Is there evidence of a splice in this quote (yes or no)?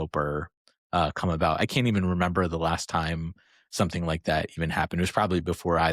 no